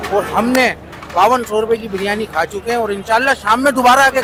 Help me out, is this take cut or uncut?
uncut